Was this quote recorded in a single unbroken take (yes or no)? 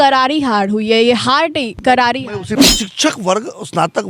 no